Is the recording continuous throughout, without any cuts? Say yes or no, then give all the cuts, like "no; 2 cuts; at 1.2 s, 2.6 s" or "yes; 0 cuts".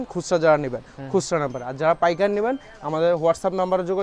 yes; 0 cuts